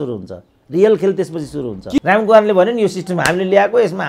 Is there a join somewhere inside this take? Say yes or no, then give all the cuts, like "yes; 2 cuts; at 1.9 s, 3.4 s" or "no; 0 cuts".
yes; 1 cut; at 2.0 s